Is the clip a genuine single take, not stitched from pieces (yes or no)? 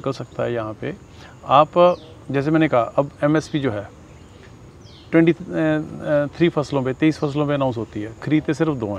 yes